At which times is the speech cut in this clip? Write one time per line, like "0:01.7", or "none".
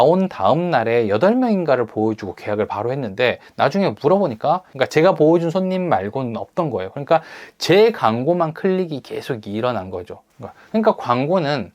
0:04.7